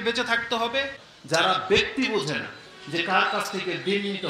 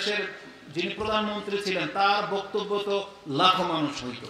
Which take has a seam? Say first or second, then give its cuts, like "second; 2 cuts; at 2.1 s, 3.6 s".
first; 1 cut; at 1.0 s